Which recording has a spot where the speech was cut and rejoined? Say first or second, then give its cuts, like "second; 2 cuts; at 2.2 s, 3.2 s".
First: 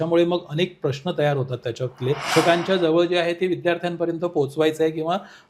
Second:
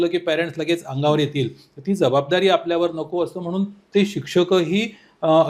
first; 1 cut; at 2.2 s